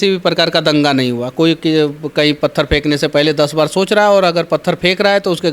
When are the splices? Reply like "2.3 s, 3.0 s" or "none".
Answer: none